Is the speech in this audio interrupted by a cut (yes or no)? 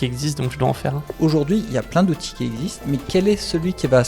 yes